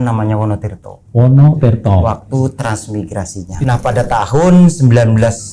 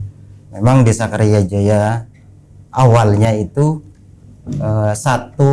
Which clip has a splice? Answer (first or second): first